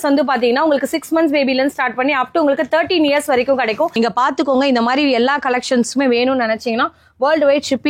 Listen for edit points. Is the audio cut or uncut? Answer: cut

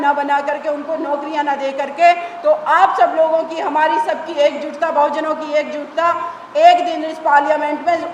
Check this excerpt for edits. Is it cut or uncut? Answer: uncut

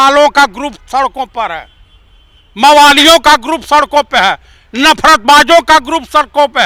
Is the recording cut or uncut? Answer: uncut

